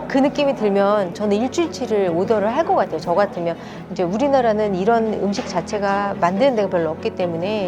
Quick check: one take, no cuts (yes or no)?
no